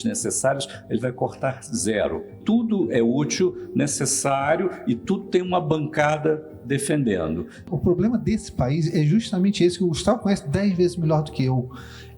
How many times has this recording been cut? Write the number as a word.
two